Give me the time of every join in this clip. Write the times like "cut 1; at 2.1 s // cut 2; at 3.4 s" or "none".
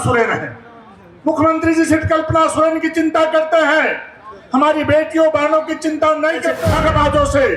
cut 1; at 6.6 s